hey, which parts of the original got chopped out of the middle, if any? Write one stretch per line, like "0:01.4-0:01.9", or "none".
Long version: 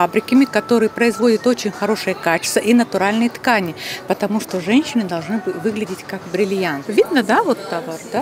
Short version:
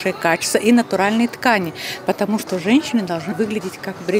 0:05.3-0:05.6